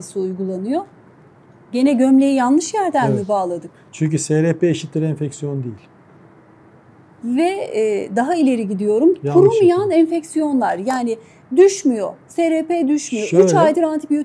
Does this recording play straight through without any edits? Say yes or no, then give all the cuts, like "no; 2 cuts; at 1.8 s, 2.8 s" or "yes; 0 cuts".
yes; 0 cuts